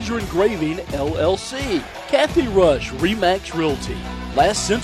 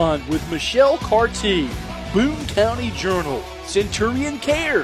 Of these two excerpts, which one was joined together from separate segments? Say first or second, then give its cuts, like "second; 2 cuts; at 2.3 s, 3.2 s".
first; 1 cut; at 2.0 s